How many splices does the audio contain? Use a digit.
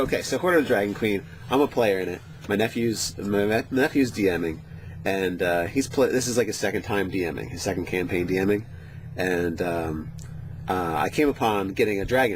1